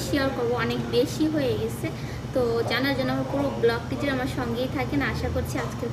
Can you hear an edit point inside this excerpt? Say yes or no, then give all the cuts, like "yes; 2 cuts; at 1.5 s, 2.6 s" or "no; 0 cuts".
no; 0 cuts